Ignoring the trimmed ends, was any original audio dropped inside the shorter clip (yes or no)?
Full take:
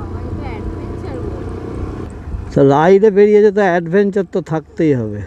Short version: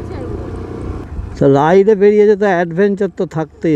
yes